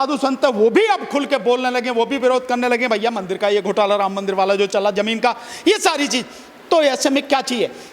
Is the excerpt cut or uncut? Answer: uncut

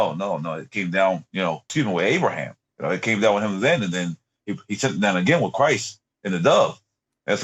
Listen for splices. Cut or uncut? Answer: cut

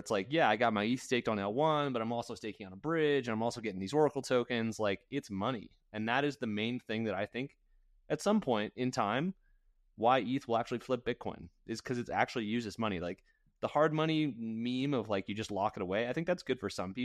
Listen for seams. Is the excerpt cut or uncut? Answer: uncut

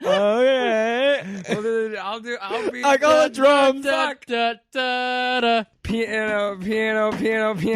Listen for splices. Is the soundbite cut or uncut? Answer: cut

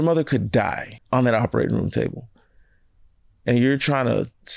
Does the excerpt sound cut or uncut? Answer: cut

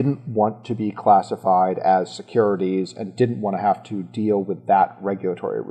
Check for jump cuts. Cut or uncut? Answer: uncut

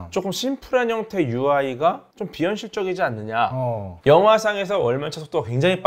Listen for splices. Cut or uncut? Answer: cut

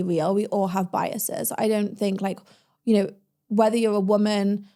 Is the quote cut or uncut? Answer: uncut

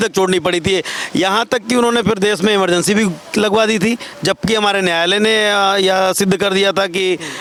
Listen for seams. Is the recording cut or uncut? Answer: uncut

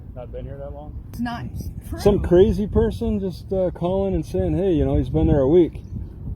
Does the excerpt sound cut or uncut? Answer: cut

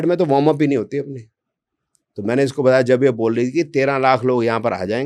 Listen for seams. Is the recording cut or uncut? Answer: uncut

